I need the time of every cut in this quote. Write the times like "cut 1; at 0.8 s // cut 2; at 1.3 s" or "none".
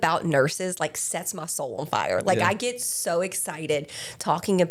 none